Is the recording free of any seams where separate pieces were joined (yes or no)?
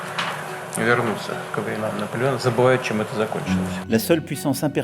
no